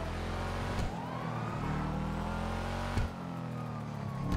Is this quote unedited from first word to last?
yes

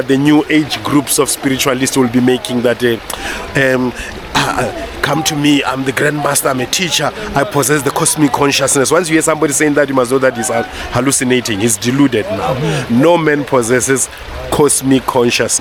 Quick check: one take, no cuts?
yes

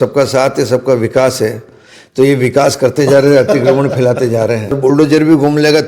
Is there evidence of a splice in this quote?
yes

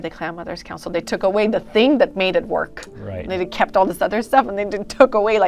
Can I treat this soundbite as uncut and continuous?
yes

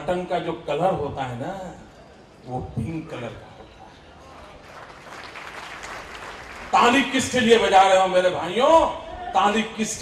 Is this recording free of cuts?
yes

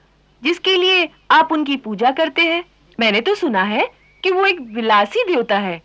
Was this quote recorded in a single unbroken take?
no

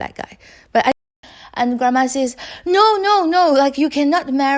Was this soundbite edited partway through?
yes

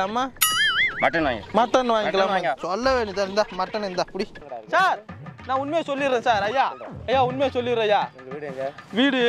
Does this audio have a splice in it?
yes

